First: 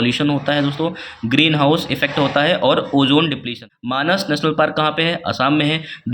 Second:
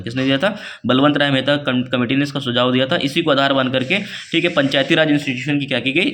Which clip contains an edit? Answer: first; 1 cut; at 3.6 s

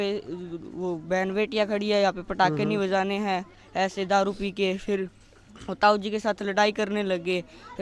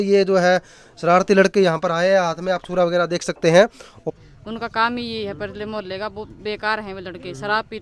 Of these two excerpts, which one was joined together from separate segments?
second; 1 cut; at 4.1 s

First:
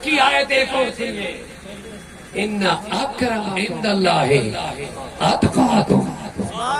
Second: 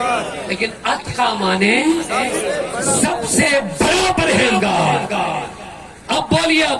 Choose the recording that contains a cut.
first; 1 cut; at 3.5 s

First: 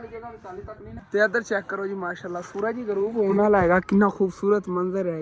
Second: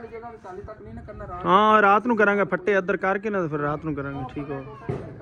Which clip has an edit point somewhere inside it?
first; 1 cut; at 0.9 s

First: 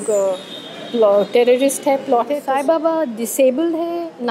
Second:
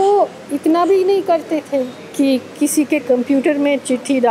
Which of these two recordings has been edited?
first; 1 cut; at 2.4 s

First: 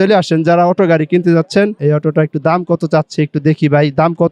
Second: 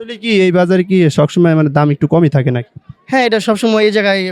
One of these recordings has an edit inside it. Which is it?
first; 1 cut; at 1.7 s

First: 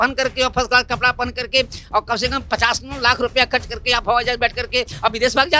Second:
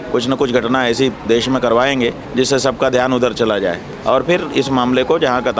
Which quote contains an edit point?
second; 2 cuts; at 2.2 s, 3.9 s

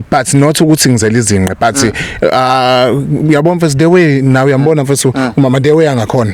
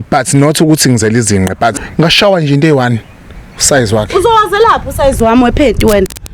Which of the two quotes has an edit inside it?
second; 1 cut; at 1.8 s

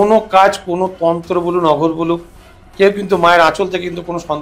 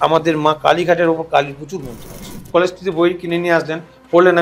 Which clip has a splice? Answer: second; 1 cut; at 2.5 s

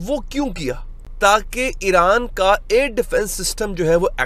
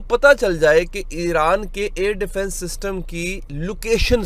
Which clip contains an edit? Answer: first; 1 cut; at 0.9 s

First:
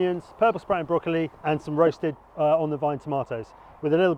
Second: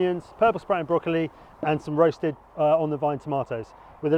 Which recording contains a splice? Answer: first; 1 cut; at 1.4 s

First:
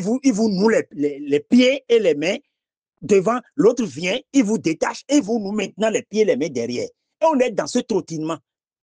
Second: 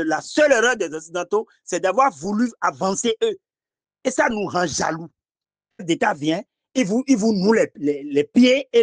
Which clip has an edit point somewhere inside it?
second; 1 cut; at 5.8 s

